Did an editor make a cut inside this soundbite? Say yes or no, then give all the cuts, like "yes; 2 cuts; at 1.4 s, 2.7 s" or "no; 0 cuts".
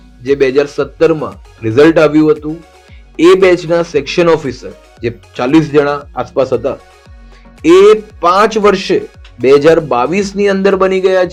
no; 0 cuts